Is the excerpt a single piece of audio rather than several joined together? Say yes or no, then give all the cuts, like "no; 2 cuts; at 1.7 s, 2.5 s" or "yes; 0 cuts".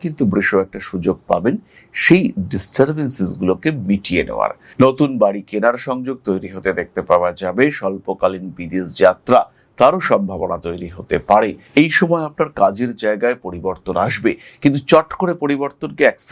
no; 2 cuts; at 4.6 s, 11.6 s